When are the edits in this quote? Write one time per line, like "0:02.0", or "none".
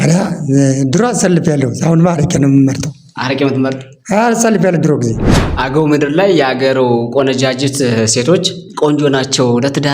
0:05.3

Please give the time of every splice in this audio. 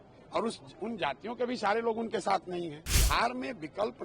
0:02.9

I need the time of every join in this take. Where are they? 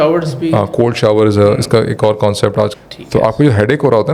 0:02.7

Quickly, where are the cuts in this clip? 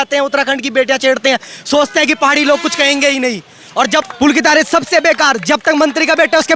0:04.1

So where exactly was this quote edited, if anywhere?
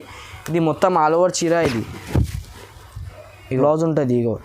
0:03.5

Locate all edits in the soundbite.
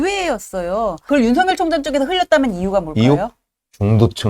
0:01.0

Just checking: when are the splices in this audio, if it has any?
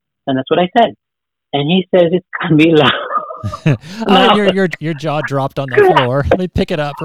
0:04.7

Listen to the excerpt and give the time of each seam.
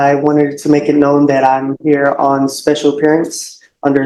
none

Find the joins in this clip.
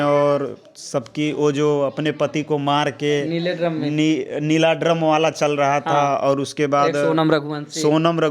none

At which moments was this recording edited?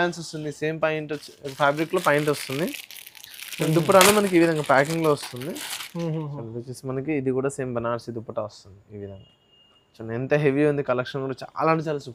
none

